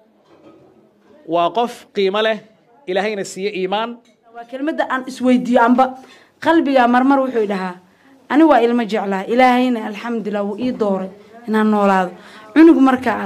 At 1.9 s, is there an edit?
no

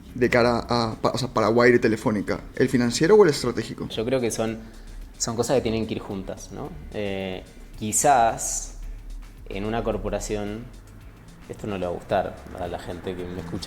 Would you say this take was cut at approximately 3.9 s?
yes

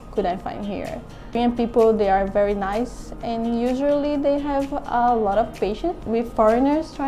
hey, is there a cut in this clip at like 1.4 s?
yes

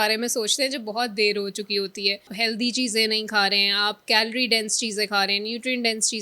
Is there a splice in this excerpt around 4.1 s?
no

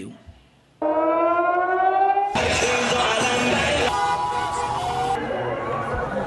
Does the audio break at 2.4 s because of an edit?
yes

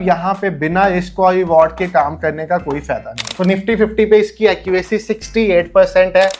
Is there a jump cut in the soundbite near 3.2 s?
yes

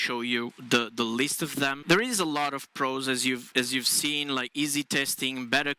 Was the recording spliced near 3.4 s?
no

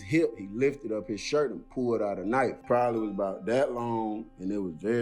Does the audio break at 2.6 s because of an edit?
yes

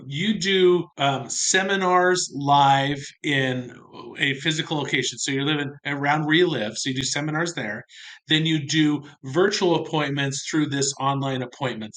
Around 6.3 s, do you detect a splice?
no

